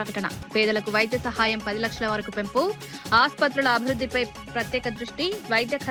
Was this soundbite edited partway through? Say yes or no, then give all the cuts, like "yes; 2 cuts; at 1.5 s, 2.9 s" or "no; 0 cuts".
no; 0 cuts